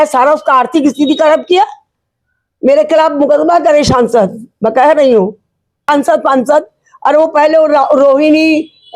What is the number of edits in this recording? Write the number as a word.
one